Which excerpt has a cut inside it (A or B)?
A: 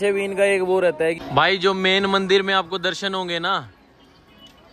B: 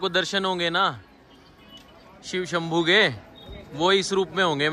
A